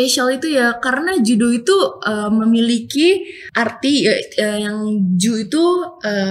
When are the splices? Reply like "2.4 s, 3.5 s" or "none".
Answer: none

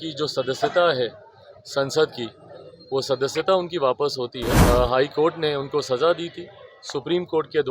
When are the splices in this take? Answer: 4.5 s

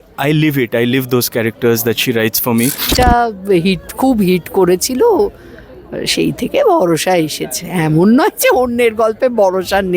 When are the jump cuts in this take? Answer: 3.0 s

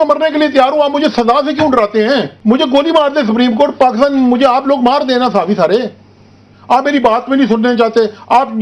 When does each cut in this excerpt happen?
2.3 s

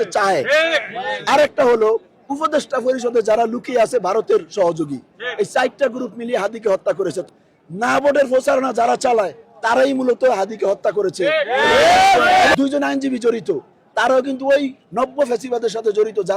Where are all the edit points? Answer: 7.2 s, 12.5 s

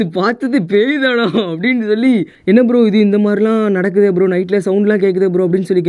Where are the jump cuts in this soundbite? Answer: 2.3 s

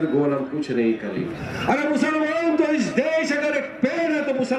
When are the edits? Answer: 1.4 s

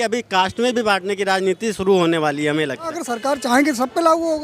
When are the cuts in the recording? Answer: 3.0 s

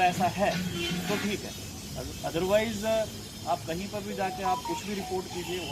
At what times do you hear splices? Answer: none

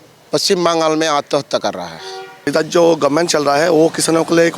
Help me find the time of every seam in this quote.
2.5 s

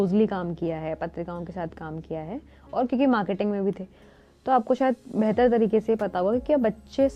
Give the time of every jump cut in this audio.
none

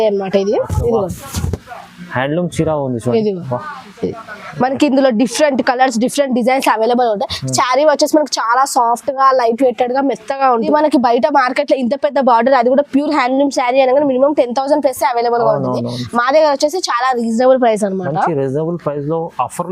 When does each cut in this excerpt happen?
10.7 s

